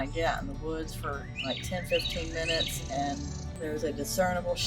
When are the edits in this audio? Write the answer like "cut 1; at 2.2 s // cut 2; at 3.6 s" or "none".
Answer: cut 1; at 3.4 s